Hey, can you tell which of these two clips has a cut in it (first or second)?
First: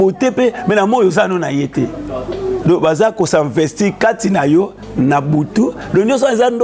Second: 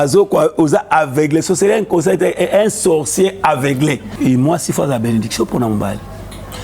second